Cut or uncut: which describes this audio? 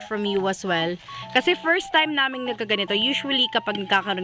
uncut